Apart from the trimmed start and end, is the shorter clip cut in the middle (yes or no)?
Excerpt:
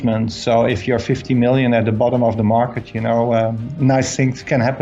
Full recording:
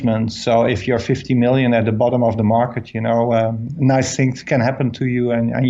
no